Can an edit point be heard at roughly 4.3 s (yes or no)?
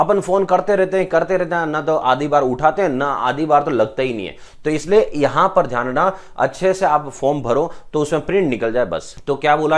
no